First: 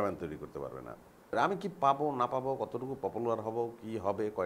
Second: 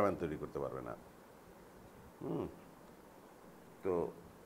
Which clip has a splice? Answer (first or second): first